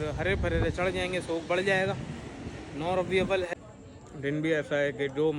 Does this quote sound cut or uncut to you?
cut